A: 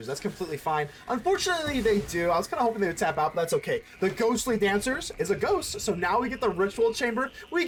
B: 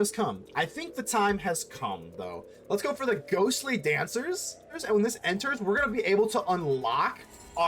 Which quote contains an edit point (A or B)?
B